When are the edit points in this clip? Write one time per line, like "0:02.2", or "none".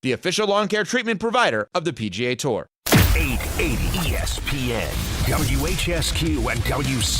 0:02.7